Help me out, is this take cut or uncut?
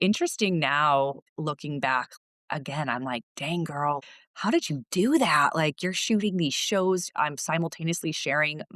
cut